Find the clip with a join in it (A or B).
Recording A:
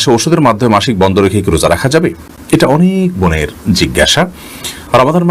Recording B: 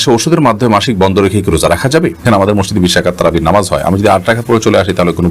B